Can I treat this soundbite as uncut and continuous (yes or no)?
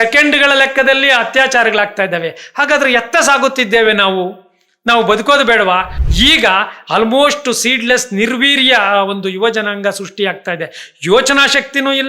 no